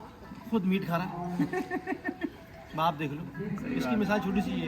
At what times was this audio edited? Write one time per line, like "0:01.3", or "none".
none